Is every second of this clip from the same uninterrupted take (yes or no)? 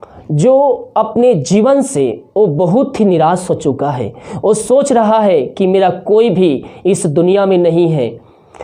yes